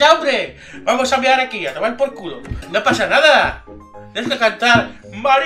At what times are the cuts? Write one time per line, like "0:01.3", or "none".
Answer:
0:02.5